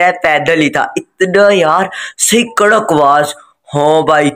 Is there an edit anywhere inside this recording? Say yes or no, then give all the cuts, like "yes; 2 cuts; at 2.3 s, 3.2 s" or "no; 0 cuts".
no; 0 cuts